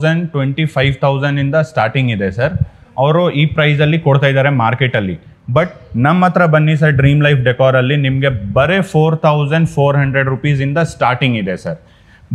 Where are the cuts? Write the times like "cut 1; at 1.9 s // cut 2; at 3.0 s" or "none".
none